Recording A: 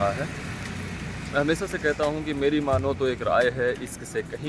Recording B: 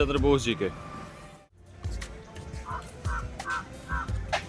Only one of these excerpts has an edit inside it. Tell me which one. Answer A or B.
B